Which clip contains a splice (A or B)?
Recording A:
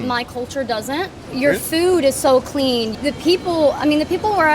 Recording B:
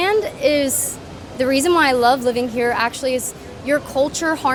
A